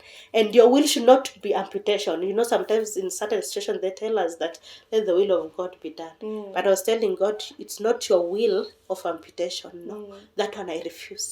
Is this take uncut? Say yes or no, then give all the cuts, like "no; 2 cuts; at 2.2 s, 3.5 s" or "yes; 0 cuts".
yes; 0 cuts